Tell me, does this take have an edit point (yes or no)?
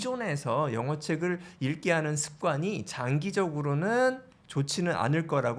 no